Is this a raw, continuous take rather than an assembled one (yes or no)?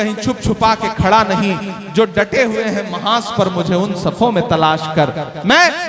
yes